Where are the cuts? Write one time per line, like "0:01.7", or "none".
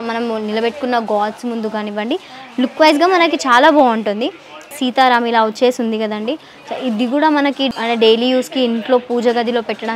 none